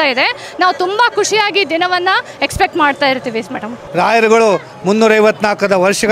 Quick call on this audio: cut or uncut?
cut